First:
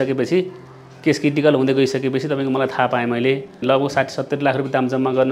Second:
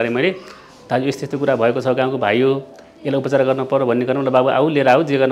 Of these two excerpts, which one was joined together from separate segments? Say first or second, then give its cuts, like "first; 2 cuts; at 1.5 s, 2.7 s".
first; 1 cut; at 3.6 s